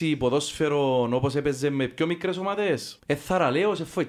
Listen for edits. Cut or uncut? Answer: cut